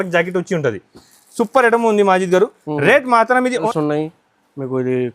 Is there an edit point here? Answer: yes; 1 cut; at 3.7 s

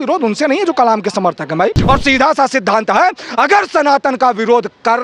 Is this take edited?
yes; 1 cut; at 1.8 s

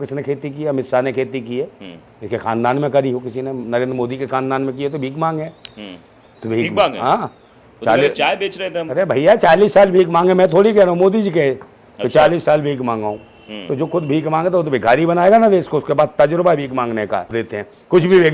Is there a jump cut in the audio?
yes; 1 cut; at 17.3 s

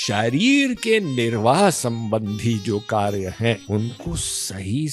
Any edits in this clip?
yes; 1 cut; at 3.6 s

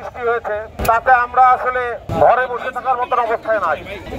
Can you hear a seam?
yes; 2 cuts; at 0.8 s, 2.0 s

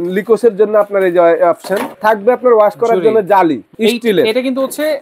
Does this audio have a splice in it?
yes; 2 cuts; at 1.9 s, 3.7 s

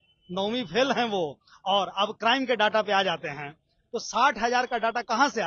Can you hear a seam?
no; 0 cuts

